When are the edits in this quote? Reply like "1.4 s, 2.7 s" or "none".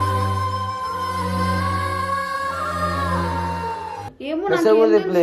none